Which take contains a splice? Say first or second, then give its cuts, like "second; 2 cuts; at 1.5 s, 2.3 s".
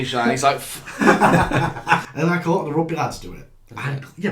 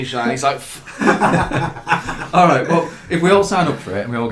first; 1 cut; at 2.1 s